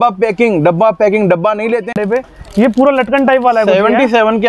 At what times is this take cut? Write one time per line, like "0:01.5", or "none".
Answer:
0:02.0